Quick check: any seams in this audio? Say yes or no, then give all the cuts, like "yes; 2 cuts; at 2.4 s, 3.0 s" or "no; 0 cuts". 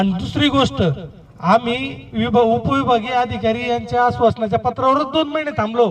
no; 0 cuts